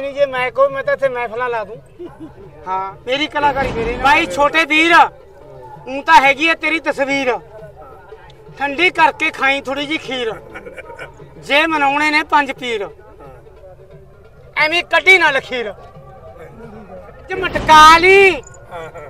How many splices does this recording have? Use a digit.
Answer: 2